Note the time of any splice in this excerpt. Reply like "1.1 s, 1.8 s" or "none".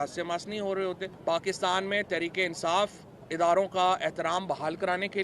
1.1 s